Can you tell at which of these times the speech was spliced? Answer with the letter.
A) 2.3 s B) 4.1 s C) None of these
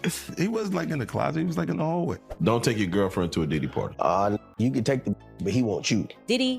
A